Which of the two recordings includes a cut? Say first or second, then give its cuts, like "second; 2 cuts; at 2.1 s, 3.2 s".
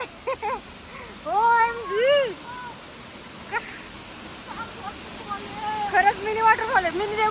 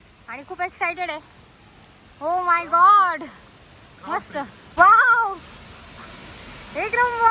second; 1 cut; at 4.7 s